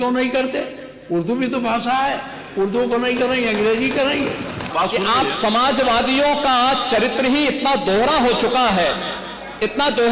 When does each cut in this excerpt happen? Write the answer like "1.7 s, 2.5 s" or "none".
4.7 s